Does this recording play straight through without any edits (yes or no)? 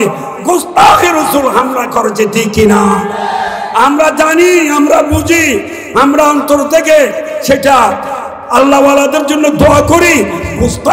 yes